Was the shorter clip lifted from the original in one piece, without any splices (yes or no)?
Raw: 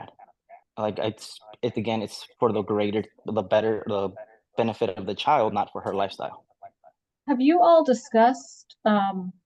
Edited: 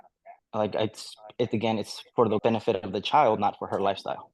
no